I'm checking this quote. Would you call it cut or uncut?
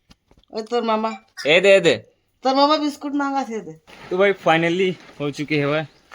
cut